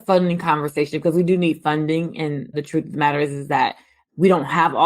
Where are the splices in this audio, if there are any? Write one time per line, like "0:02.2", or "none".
0:02.6

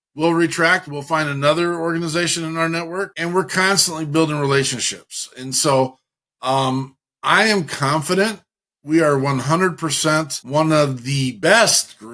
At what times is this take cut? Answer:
0:03.1
0:10.4
0:11.3

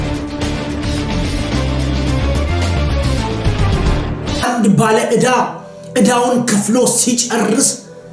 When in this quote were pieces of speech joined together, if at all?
0:04.4

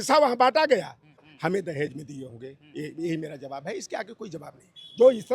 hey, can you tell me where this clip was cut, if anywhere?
0:01.2

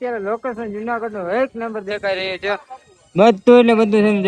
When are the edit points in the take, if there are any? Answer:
none

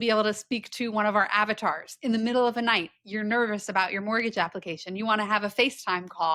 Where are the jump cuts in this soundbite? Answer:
none

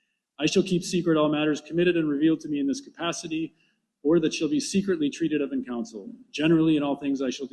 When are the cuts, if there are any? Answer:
0:06.6

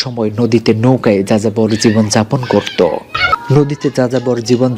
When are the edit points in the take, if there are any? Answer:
0:03.2

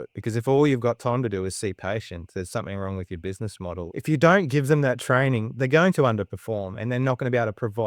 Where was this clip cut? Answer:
0:03.9
0:05.5

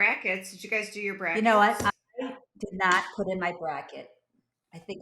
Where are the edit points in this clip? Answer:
0:01.3

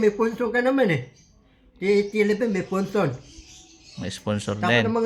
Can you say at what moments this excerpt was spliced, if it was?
none

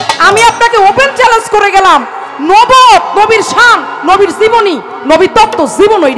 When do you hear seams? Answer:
none

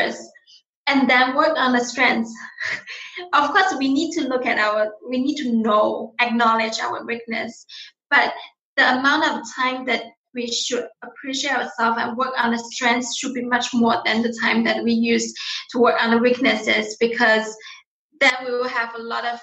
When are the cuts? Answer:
none

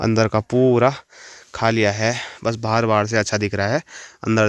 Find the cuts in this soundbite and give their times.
none

